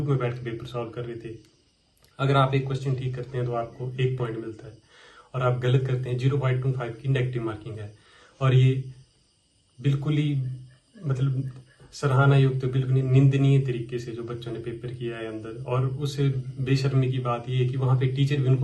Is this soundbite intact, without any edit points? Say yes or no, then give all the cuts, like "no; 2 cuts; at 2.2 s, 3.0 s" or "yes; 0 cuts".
yes; 0 cuts